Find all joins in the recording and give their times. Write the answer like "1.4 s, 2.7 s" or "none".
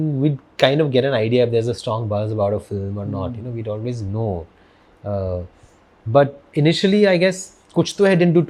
none